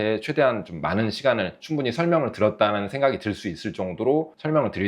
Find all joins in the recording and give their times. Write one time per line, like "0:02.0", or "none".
0:01.6